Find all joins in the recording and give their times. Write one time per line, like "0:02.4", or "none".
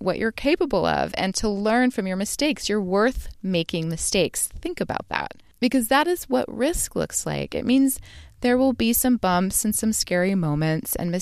0:05.4